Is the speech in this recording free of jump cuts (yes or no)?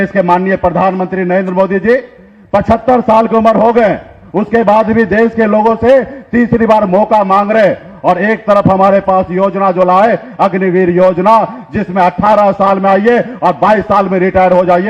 yes